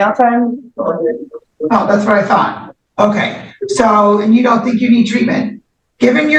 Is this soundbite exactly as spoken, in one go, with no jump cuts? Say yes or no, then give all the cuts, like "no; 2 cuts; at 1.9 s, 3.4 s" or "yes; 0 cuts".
yes; 0 cuts